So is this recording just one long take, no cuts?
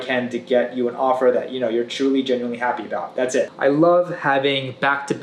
no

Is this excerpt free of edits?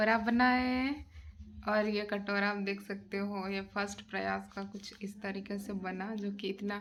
yes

